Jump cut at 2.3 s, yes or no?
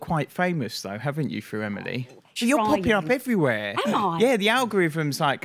yes